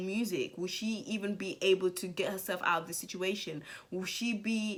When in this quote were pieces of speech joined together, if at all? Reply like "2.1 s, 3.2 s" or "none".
none